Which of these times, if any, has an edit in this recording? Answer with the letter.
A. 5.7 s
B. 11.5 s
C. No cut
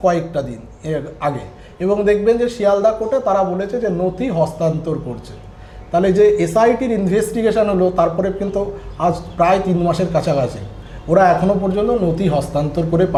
C